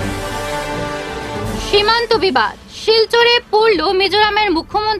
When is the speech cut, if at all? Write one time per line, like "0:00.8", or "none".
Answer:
0:01.2

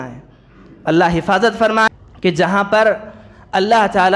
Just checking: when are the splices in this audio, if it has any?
0:01.9

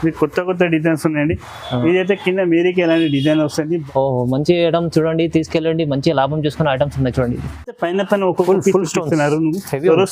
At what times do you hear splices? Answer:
0:03.8
0:07.8

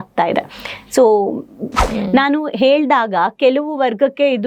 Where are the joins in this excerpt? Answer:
0:01.8

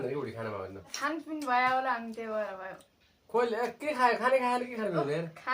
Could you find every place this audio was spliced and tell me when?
0:00.9

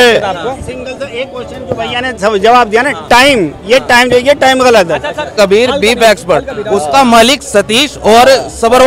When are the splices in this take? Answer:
0:05.3

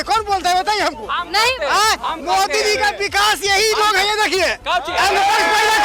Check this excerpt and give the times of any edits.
none

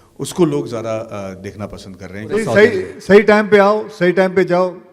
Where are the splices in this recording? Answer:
0:02.4

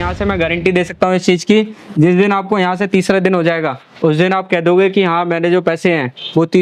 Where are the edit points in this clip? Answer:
none

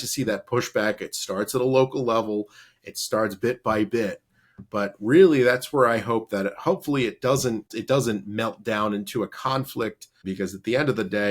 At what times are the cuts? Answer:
0:07.7
0:10.2

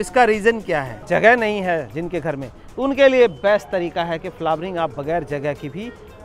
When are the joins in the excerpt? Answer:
0:01.0

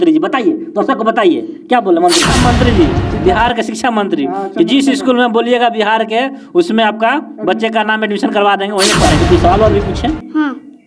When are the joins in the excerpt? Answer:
0:02.3
0:09.1

